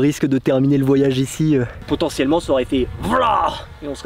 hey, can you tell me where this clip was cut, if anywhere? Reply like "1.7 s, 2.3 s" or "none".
1.8 s